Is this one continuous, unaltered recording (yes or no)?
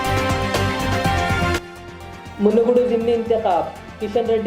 yes